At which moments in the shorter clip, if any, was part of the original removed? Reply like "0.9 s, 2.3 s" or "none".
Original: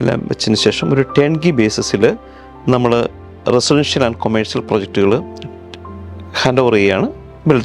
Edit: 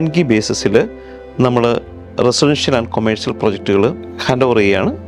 4.1 s